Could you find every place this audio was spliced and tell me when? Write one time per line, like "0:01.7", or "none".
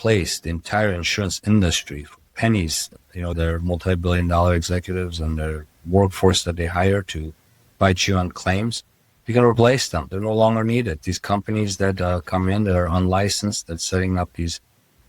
0:03.3